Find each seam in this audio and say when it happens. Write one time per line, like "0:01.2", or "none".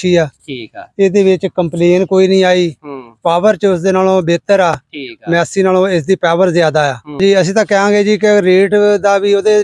0:07.2